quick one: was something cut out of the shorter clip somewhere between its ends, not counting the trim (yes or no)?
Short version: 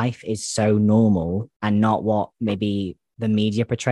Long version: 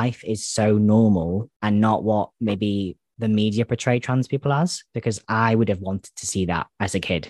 no